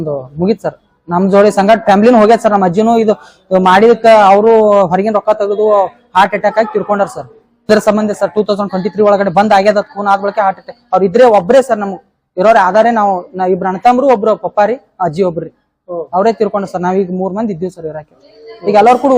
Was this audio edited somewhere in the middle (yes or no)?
yes